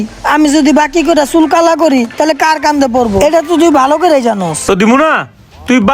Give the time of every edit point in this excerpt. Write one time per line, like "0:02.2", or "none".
0:04.6